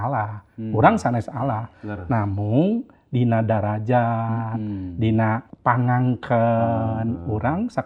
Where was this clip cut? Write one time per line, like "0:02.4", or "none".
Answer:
0:05.5